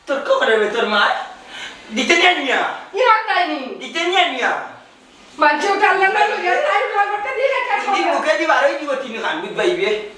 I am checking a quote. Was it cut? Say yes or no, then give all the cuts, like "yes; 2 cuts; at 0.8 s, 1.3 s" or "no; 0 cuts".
no; 0 cuts